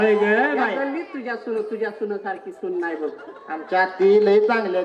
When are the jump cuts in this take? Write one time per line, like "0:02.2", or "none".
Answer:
none